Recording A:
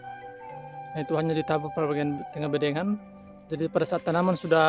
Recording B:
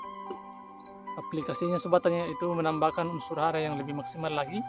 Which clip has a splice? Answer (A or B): A